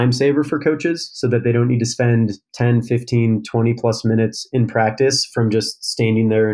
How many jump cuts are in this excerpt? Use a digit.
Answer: 0